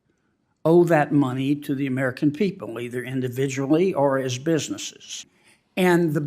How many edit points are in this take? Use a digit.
1